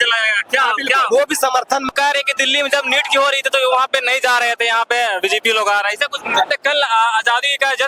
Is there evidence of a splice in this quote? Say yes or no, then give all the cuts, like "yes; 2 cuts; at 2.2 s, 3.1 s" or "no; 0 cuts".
yes; 2 cuts; at 1.9 s, 6.5 s